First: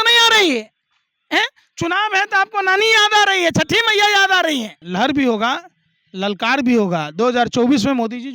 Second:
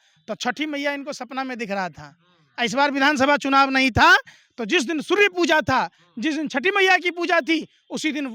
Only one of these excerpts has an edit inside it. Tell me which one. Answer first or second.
first